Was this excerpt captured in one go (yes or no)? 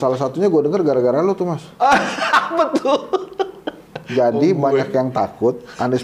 yes